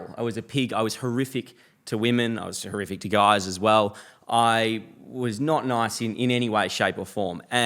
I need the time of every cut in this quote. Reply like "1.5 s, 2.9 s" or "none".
none